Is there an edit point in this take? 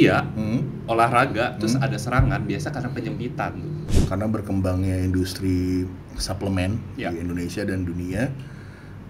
yes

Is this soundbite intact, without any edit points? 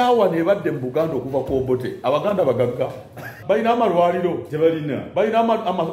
no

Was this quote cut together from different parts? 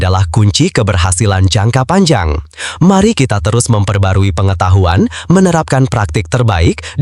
no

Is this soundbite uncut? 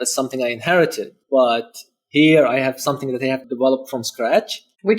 no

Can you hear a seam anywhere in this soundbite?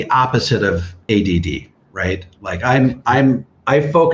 yes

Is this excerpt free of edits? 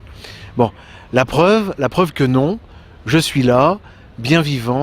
no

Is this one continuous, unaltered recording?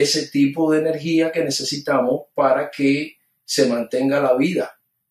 yes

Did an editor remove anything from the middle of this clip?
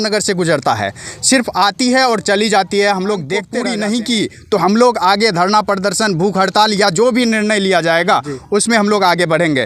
yes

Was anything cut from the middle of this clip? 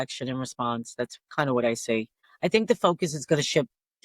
yes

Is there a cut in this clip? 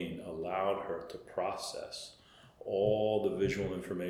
no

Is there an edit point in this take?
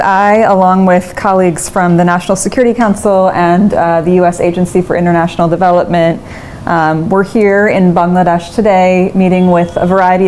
no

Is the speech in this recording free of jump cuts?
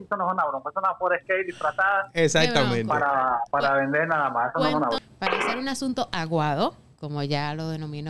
no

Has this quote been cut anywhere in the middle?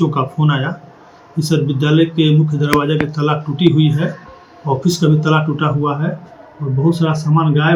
no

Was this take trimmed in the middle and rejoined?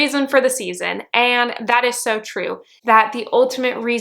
yes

